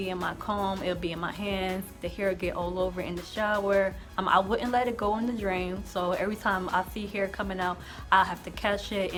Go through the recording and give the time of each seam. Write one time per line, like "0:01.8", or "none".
none